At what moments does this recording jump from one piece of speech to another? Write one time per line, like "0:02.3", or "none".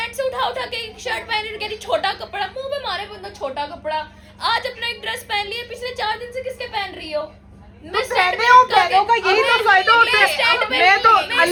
none